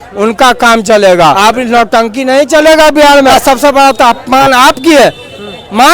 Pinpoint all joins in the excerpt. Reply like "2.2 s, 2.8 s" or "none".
1.4 s, 3.3 s